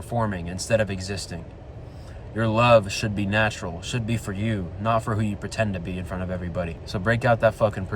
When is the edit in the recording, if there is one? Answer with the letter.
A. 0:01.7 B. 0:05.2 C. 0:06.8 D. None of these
C